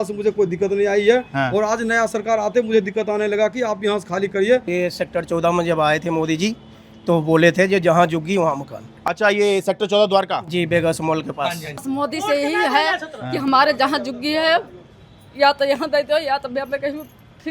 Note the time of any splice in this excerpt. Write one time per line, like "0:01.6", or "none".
0:04.7
0:11.8